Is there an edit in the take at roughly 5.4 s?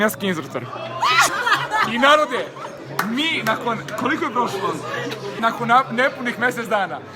yes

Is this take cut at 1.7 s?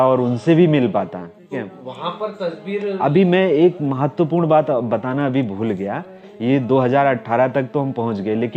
yes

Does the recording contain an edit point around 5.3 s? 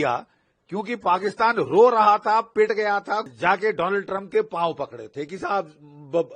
no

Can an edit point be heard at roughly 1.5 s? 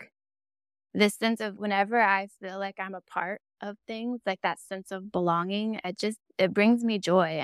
yes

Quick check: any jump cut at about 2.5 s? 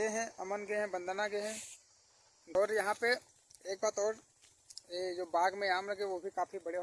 yes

